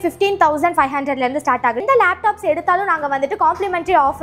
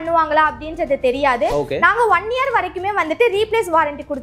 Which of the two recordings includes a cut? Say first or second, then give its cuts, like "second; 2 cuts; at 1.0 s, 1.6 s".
first; 1 cut; at 1.8 s